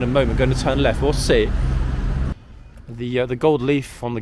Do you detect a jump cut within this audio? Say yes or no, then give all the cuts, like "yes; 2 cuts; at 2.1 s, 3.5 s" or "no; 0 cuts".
yes; 1 cut; at 2.3 s